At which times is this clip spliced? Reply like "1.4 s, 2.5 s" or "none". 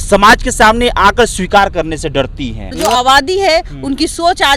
2.8 s

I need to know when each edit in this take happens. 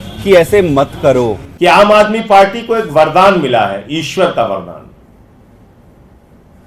1.4 s

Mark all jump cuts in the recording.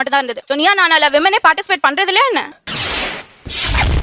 none

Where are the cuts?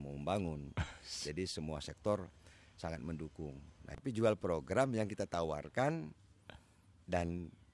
3.9 s

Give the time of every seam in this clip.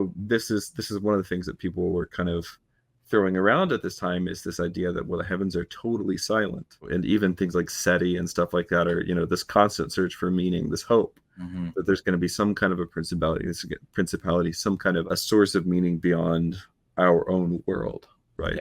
6.9 s, 15.0 s

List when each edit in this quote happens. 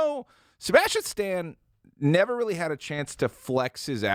none

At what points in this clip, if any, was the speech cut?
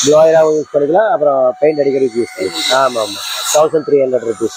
none

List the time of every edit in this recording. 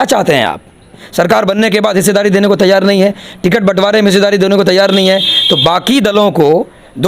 1.0 s

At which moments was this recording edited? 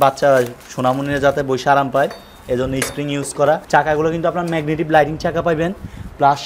3.6 s

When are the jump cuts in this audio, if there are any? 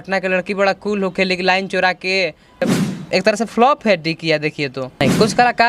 2.6 s, 5.0 s

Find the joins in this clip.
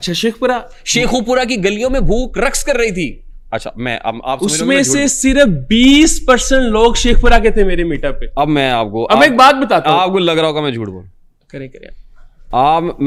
none

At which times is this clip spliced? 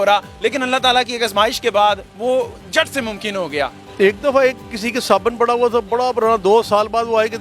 3.8 s

